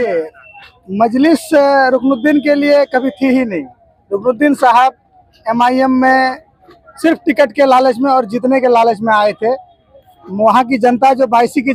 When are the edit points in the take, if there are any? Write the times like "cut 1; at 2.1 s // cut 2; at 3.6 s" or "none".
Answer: none